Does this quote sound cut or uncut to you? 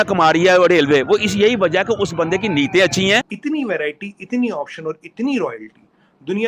cut